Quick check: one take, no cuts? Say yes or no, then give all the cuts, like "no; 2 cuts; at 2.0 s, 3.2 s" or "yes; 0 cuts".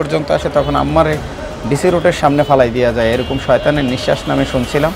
yes; 0 cuts